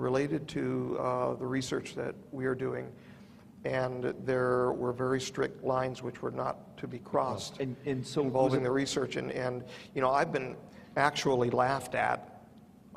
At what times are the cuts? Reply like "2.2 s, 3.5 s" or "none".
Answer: 11.2 s